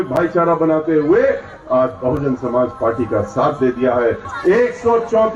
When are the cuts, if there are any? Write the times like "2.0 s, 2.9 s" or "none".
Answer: 4.3 s